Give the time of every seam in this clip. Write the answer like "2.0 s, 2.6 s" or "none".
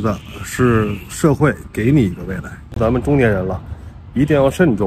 2.8 s